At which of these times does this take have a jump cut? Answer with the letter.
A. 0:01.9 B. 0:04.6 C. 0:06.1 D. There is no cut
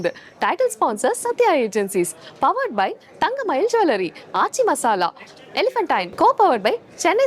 C